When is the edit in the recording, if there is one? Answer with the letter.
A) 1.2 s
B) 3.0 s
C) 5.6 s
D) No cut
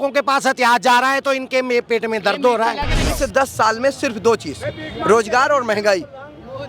B